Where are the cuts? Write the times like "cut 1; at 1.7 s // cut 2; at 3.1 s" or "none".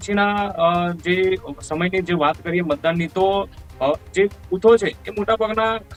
none